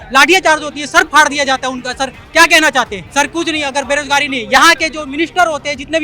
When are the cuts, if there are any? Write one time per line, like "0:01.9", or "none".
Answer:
0:03.0

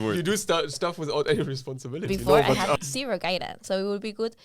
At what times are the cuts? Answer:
0:02.8

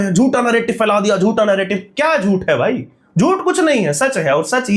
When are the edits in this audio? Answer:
none

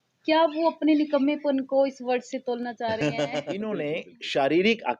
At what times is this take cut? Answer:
0:03.7

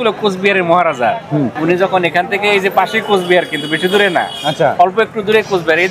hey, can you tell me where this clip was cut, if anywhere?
0:01.5

